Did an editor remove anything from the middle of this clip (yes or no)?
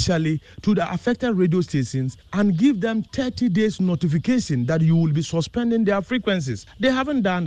no